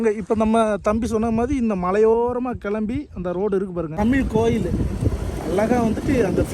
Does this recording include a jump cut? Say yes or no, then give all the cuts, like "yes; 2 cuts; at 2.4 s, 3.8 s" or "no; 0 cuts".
yes; 1 cut; at 3.9 s